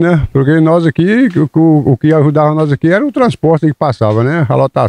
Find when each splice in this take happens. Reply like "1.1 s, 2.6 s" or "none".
none